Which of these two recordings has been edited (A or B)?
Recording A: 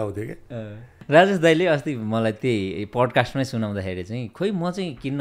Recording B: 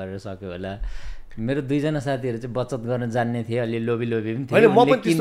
A